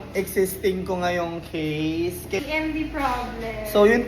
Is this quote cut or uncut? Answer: cut